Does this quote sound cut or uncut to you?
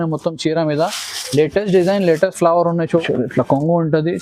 cut